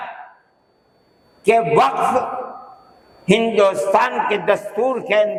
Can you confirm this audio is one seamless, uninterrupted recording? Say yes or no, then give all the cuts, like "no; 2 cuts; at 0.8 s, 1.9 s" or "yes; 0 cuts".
yes; 0 cuts